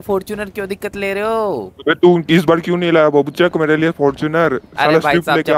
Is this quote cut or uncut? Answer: uncut